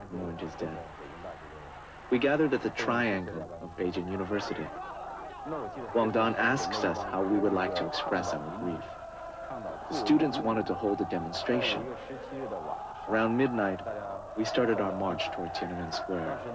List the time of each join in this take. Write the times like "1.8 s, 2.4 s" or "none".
none